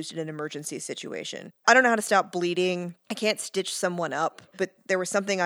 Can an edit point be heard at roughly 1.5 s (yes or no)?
yes